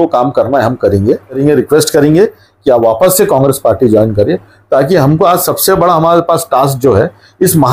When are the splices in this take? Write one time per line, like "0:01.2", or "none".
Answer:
0:01.4